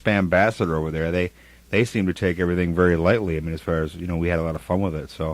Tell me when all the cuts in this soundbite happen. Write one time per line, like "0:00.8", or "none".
0:04.1